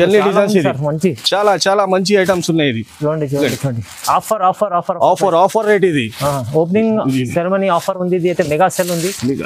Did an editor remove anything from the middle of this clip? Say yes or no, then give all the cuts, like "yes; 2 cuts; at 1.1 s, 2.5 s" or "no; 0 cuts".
no; 0 cuts